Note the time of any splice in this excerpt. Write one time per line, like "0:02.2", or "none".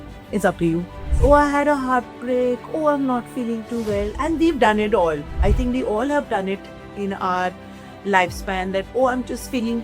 0:01.1